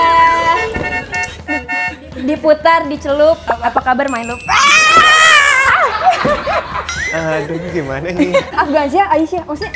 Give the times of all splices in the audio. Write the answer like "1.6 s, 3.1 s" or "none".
8.4 s

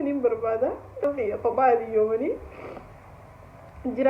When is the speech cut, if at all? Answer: 1.0 s

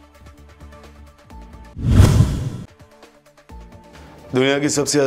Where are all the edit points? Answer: 1.6 s

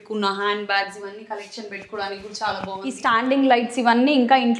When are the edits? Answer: 3.0 s

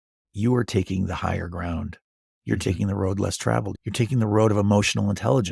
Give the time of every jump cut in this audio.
3.8 s

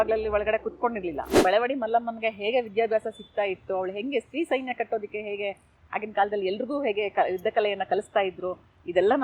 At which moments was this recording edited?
1.3 s

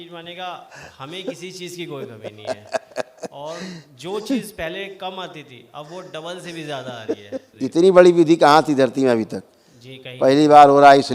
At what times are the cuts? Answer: 7.5 s

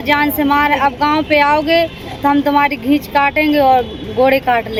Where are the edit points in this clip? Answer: none

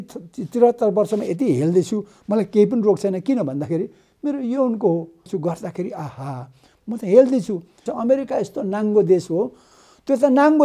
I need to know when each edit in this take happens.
5.3 s, 7.9 s

